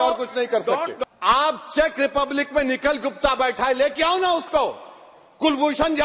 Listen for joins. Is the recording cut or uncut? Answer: cut